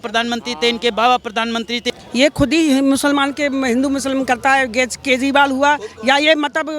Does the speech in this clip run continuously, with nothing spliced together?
no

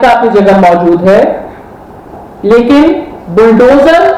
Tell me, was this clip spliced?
no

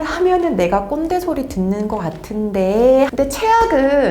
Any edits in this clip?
yes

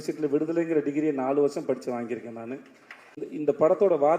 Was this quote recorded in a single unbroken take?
no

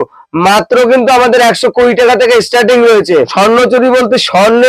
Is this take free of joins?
no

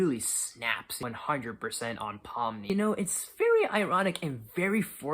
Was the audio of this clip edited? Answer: yes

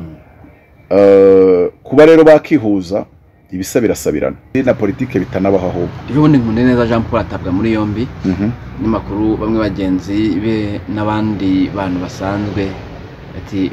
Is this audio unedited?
no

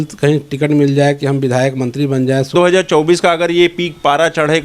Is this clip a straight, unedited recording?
no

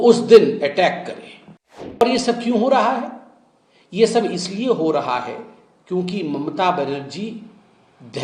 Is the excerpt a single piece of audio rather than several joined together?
no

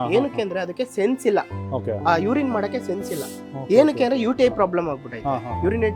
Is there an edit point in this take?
no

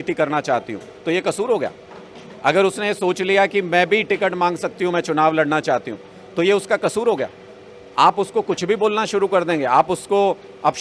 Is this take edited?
no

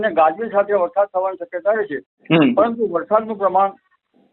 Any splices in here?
no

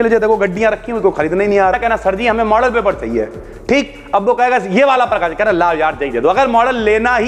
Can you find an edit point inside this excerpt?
yes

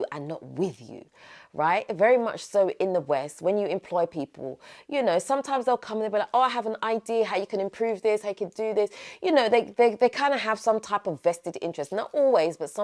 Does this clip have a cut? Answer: no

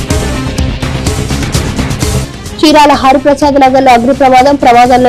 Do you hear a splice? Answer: no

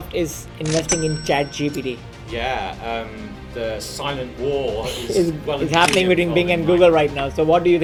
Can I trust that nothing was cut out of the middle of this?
yes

